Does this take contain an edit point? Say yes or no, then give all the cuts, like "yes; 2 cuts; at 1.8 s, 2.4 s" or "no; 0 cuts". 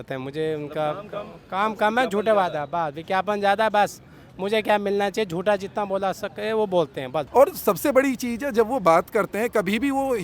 yes; 1 cut; at 7.3 s